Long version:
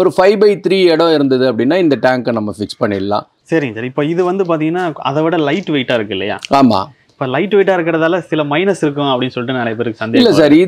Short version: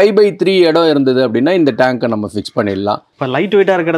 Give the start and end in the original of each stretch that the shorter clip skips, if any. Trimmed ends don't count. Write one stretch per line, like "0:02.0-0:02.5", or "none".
0:03.3-0:07.1